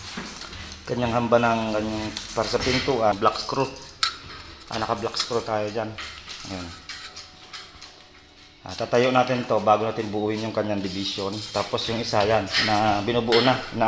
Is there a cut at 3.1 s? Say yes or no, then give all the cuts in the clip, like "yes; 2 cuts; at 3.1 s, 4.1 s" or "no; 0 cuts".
yes; 1 cut; at 3.1 s